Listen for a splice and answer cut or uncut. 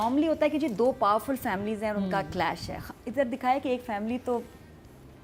uncut